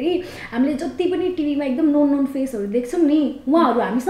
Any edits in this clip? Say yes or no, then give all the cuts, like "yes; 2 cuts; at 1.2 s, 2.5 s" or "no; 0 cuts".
no; 0 cuts